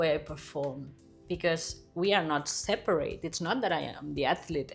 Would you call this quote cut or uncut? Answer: uncut